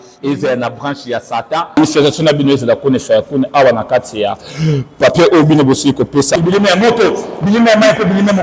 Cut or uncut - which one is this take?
cut